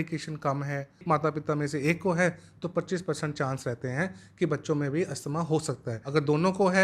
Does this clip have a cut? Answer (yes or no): yes